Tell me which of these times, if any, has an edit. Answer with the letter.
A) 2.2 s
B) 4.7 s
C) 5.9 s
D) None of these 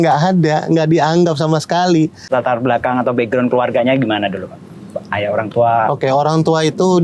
A